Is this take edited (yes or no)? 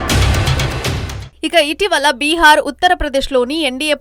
yes